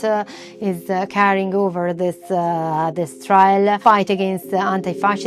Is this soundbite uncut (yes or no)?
yes